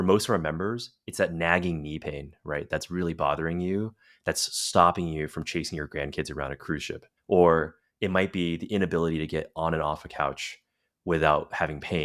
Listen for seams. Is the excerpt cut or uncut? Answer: cut